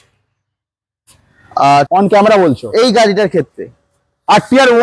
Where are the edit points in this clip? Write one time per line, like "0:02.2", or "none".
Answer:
0:01.9